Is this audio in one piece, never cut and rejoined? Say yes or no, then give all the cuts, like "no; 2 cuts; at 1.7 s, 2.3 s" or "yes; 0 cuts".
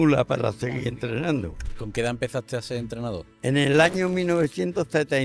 no; 1 cut; at 1.5 s